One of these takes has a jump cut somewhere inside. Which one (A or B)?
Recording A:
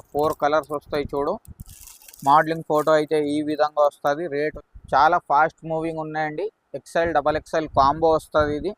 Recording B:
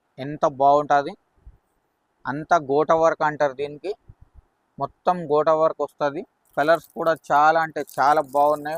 A